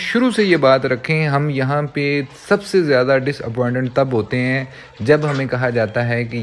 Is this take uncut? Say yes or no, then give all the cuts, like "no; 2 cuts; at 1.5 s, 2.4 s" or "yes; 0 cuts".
yes; 0 cuts